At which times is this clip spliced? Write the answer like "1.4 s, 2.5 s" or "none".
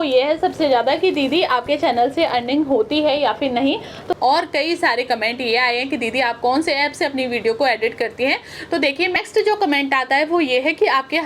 4.0 s, 9.1 s

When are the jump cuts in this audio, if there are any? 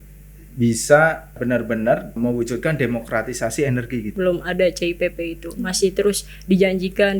1.4 s, 2.1 s, 4.1 s

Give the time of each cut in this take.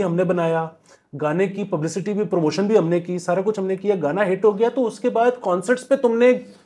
none

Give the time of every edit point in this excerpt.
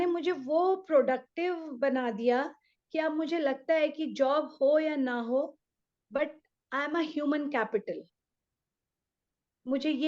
none

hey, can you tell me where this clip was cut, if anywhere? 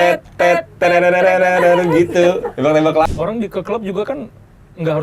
3.1 s

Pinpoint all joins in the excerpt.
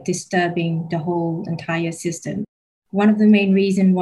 2.8 s

